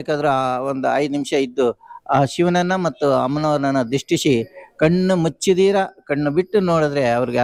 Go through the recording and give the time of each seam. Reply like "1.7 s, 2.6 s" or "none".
none